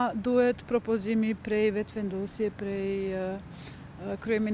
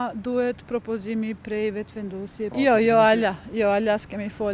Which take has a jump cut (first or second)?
second